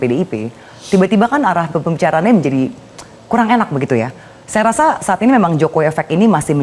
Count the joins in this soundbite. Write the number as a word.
zero